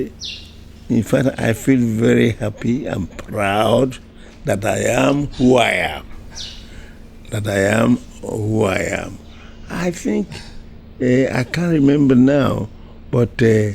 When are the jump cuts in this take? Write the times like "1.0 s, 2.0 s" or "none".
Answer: none